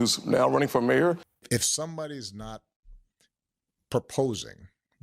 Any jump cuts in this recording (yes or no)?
yes